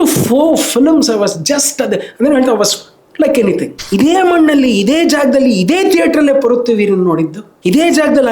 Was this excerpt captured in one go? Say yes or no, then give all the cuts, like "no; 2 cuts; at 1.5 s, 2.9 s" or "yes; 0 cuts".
no; 1 cut; at 3.7 s